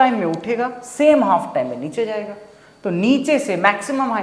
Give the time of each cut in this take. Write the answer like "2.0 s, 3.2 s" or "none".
none